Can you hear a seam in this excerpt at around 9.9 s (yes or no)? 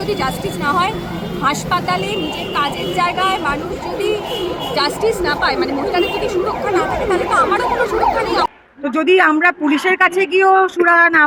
no